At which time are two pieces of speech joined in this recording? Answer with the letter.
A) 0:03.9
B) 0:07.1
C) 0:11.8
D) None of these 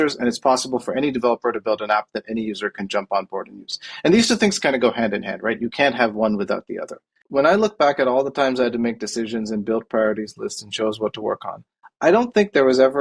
B